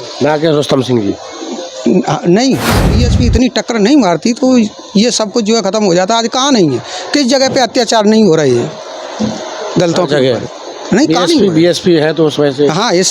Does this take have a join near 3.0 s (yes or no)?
yes